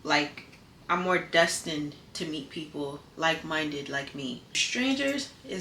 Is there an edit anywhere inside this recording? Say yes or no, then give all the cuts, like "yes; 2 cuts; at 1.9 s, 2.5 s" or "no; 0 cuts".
yes; 1 cut; at 4.6 s